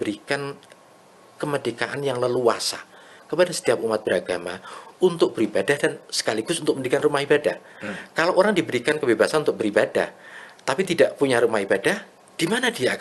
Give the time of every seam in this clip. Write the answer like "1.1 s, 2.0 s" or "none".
none